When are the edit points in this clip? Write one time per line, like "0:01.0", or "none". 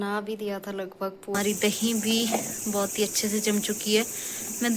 0:01.4